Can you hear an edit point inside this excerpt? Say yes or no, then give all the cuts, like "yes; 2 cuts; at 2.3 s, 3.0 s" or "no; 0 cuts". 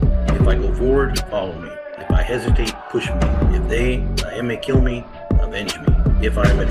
no; 0 cuts